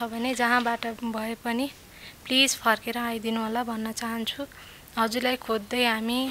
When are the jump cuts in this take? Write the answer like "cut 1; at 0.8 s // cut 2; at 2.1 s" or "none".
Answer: cut 1; at 1.0 s